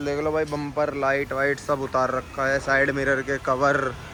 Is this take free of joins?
yes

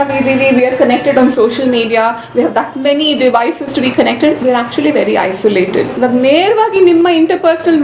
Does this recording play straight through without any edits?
no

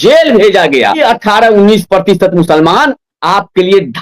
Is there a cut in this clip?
yes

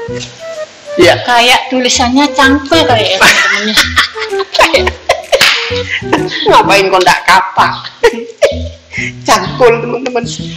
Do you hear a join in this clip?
no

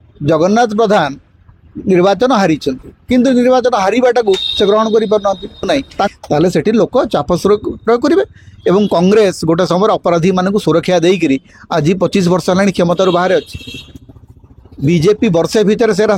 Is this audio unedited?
no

